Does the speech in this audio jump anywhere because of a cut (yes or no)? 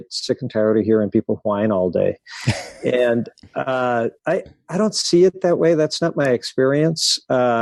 no